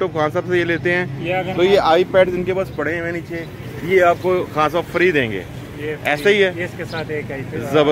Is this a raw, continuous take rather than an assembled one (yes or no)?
yes